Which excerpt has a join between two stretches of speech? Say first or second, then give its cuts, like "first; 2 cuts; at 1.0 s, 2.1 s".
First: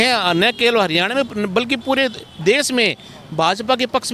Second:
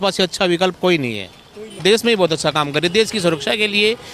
second; 1 cut; at 1.8 s